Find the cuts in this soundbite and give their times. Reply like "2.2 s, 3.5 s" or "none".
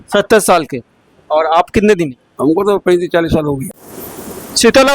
3.7 s

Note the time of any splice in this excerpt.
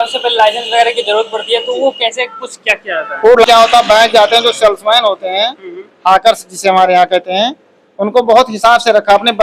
3.4 s

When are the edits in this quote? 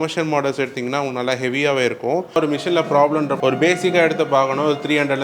2.4 s, 3.4 s

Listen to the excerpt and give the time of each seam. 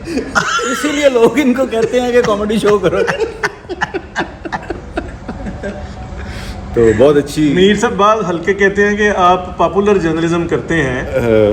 none

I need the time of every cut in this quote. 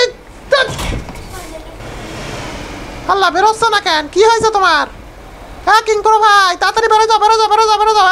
1.6 s

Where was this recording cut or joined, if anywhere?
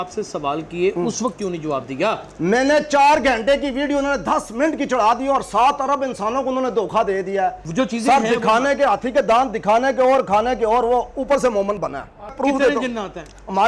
7.6 s, 12.3 s

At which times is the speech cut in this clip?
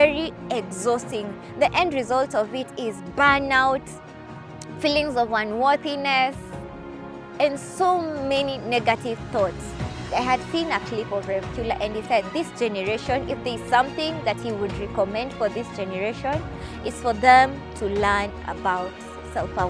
10.1 s

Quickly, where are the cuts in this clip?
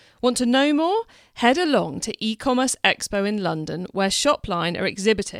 none

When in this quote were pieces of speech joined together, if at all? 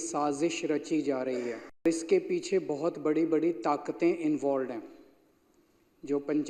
1.8 s

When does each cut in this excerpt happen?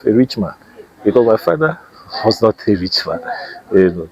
none

